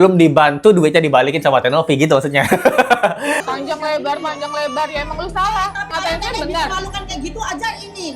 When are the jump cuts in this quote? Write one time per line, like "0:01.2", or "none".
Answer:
0:03.4
0:05.9